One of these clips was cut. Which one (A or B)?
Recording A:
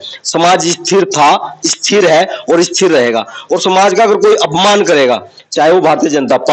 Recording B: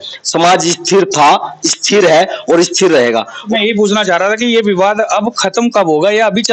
B